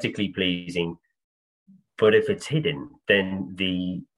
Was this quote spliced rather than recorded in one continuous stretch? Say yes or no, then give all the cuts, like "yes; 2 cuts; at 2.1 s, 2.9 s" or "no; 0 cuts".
no; 0 cuts